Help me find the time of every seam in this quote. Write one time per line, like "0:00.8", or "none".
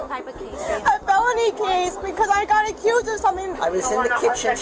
0:03.5